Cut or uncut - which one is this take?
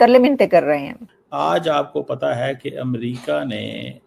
cut